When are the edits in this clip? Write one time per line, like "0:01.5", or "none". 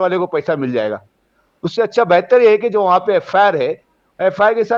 none